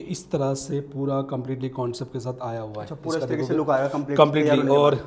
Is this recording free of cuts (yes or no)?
yes